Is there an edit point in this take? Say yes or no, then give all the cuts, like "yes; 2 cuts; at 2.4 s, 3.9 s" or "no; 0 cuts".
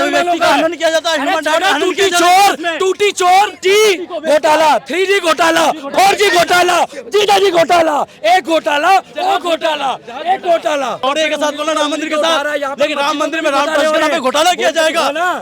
yes; 2 cuts; at 3.6 s, 11.0 s